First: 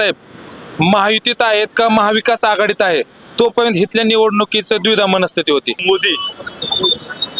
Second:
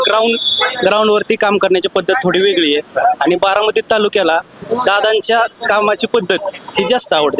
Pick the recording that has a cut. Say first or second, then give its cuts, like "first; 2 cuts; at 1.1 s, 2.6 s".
first; 1 cut; at 5.8 s